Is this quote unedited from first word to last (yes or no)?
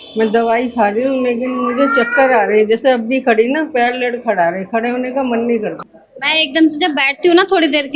no